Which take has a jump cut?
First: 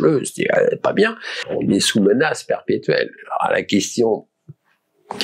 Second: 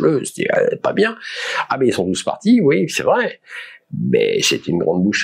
first; 1 cut; at 1.5 s

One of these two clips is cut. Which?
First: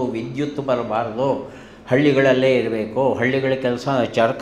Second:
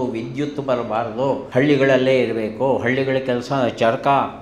second; 1 cut; at 1.4 s

